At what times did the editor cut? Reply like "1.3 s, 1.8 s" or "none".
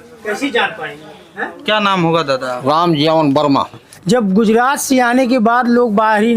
3.9 s